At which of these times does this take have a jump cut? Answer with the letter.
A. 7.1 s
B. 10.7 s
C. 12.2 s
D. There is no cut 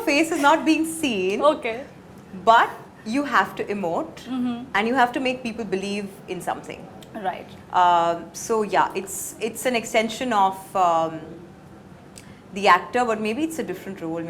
D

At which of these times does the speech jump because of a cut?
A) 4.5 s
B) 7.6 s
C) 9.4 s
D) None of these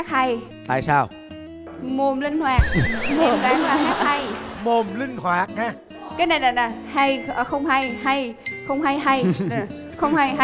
D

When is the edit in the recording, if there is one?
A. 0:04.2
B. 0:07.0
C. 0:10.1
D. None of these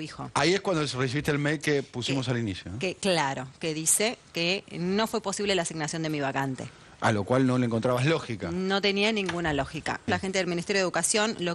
C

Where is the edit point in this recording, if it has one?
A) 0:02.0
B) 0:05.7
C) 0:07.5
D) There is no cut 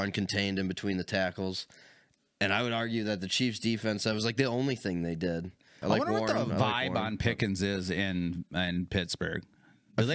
B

